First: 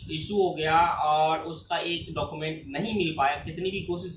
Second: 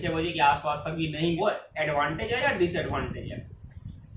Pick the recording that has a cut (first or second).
second